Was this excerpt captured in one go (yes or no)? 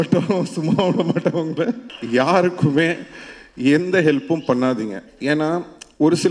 no